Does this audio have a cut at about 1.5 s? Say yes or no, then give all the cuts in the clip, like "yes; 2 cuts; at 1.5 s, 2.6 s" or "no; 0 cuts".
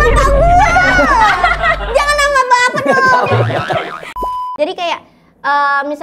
no; 1 cut; at 4.2 s